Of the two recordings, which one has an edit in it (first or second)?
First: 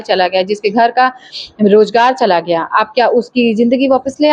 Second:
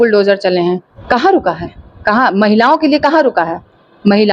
second